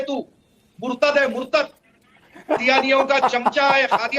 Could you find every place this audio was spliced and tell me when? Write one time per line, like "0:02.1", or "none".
0:02.6